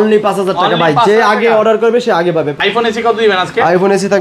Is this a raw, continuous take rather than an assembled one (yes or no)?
no